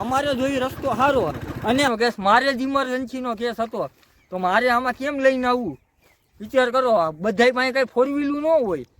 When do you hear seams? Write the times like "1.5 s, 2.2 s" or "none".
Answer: 1.9 s